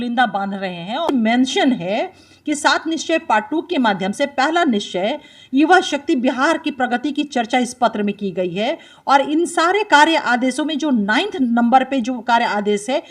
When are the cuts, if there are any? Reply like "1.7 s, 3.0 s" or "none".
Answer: 1.0 s

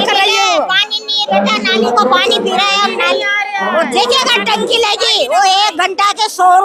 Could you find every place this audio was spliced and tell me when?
none

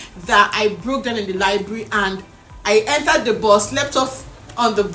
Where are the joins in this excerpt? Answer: none

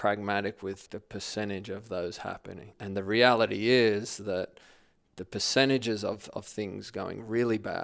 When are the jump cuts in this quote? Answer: 0.9 s, 2.7 s

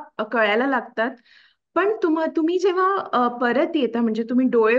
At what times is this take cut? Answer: none

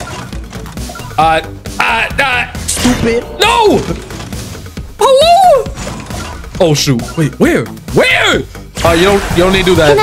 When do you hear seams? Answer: 8.8 s

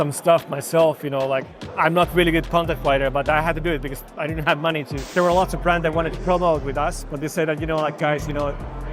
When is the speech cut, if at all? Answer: 1.6 s, 5.1 s

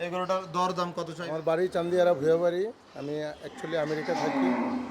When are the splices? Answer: 1.2 s

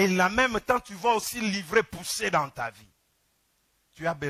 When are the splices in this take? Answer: none

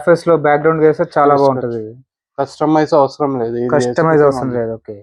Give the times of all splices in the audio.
none

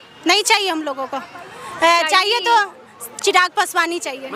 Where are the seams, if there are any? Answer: none

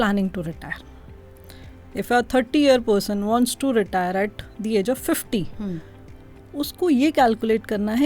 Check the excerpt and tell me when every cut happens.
none

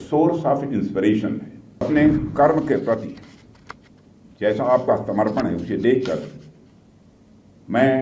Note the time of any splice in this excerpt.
1.9 s

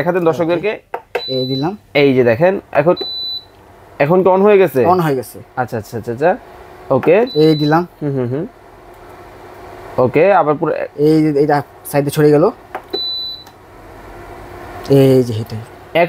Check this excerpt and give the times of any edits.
none

